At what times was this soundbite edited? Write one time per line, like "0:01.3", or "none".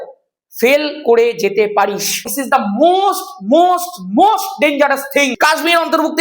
0:02.5
0:05.2